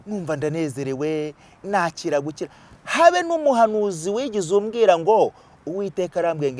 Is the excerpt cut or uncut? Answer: uncut